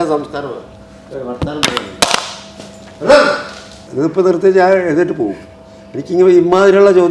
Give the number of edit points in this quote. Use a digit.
1